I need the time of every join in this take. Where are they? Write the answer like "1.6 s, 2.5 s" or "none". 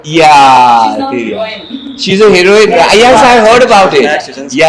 none